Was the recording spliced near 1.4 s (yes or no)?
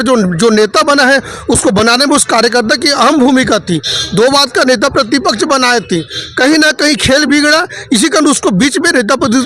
no